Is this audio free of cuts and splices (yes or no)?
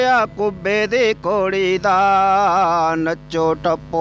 yes